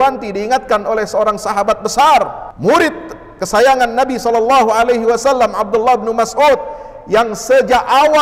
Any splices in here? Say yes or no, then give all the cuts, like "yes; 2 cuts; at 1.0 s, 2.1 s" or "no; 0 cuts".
yes; 1 cut; at 2.4 s